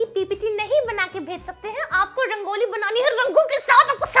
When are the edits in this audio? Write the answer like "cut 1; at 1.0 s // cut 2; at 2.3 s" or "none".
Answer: none